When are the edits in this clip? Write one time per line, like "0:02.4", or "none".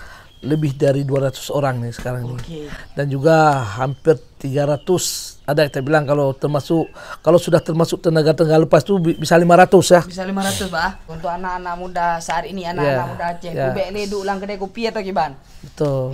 0:11.1